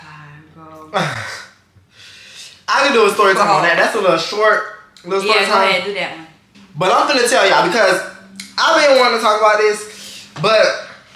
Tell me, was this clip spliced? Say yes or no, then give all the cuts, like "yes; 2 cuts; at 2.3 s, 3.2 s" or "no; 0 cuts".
no; 0 cuts